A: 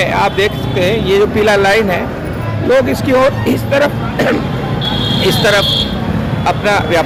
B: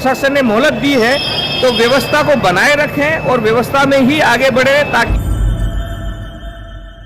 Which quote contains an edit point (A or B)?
B